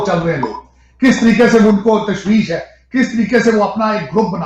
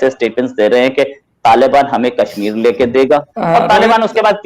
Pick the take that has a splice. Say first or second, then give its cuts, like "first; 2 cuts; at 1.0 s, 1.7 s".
second; 1 cut; at 3.3 s